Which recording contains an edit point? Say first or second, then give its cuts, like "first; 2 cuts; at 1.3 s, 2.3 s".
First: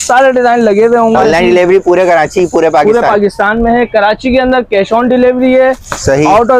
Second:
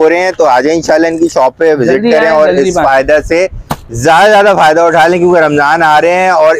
first; 1 cut; at 1.1 s